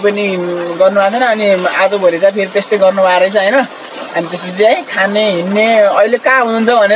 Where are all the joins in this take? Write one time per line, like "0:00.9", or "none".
none